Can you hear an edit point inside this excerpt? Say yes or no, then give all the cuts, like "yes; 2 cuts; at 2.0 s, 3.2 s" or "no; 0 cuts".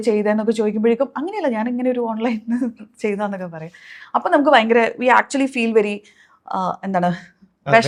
no; 0 cuts